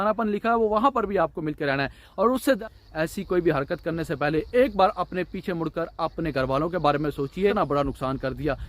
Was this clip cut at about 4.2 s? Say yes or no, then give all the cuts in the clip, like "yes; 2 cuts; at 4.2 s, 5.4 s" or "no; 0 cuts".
no; 2 cuts; at 2.6 s, 7.5 s